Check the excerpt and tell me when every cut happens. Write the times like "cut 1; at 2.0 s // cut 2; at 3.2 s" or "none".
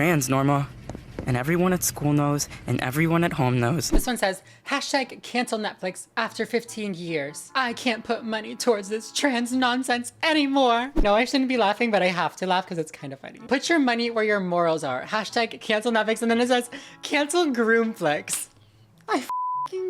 cut 1; at 3.9 s // cut 2; at 11.0 s // cut 3; at 13.3 s

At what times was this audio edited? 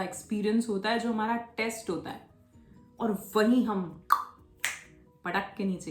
none

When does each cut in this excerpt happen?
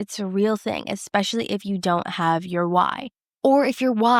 none

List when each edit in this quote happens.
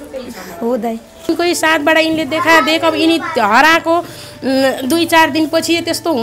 cut 1; at 1.3 s

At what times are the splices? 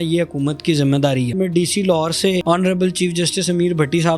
cut 1; at 1.3 s // cut 2; at 2.4 s

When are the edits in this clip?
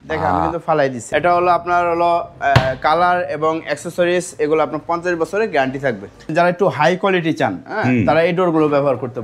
cut 1; at 1.0 s // cut 2; at 6.3 s

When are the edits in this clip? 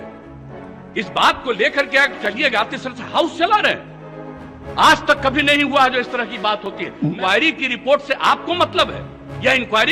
cut 1; at 7.2 s

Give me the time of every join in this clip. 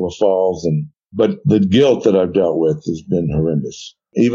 cut 1; at 1.0 s

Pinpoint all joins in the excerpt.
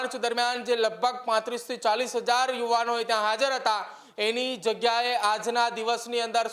none

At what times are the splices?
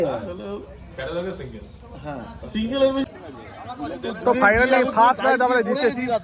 cut 1; at 3.0 s

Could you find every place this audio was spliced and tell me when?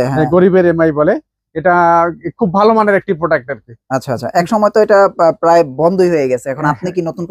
none

